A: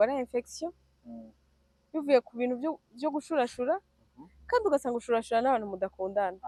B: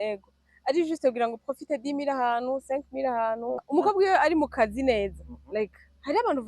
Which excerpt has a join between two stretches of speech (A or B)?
B